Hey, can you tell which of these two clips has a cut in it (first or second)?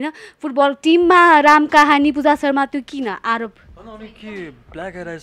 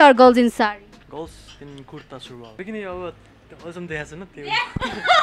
second